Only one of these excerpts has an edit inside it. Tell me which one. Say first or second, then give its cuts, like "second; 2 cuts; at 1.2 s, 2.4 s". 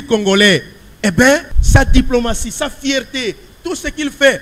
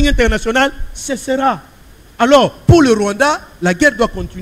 first; 1 cut; at 1.6 s